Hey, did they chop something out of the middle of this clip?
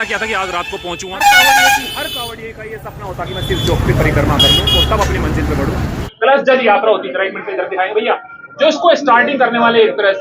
yes; 2 cuts; at 1.1 s, 6.0 s

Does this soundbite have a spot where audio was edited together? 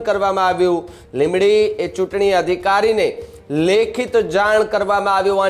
yes; 1 cut; at 1.0 s

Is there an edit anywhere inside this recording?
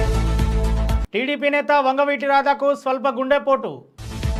no; 0 cuts

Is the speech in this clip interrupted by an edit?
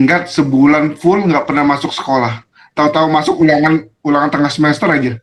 no; 0 cuts

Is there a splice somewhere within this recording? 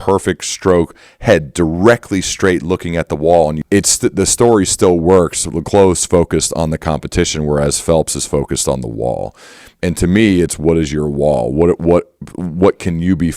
yes; 1 cut; at 3.6 s

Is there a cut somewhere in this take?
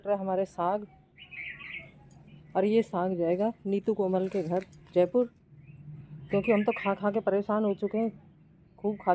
no; 0 cuts

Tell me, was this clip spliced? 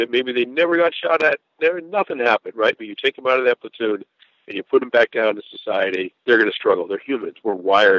yes; 1 cut; at 6.1 s

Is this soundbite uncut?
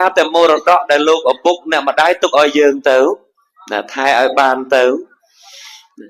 yes; 0 cuts

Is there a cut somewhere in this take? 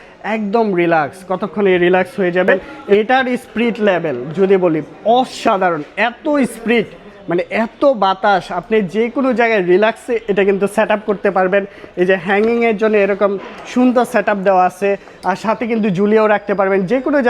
yes; 1 cut; at 2.7 s

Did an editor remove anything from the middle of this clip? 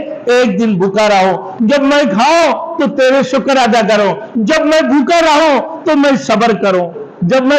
no; 0 cuts

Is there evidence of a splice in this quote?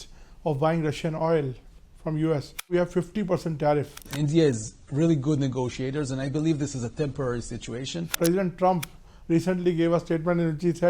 yes; 3 cuts; at 2.7 s, 4.1 s, 8.1 s

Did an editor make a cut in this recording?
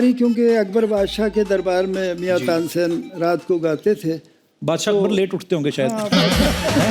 no; 0 cuts

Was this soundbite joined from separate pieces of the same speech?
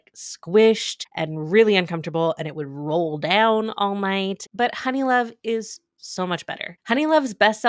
yes; 3 cuts; at 1.1 s, 4.5 s, 6.7 s

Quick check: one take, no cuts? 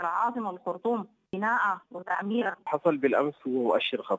no; 2 cuts; at 1.3 s, 2.6 s

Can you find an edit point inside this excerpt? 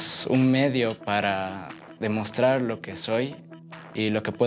no; 0 cuts

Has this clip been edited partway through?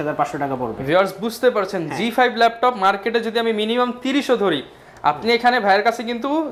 no; 0 cuts

